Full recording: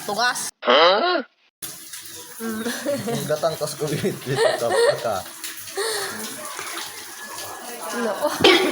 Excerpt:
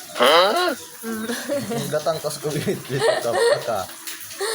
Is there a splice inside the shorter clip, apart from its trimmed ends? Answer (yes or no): yes